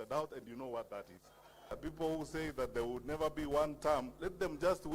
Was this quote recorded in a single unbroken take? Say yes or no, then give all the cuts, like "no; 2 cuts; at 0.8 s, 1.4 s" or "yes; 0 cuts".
no; 1 cut; at 1.7 s